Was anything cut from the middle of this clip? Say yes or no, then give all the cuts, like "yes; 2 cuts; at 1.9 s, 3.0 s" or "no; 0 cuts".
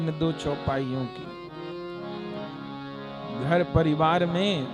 no; 0 cuts